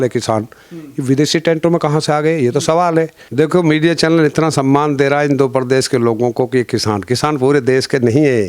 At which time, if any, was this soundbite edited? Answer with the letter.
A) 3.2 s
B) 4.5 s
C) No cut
A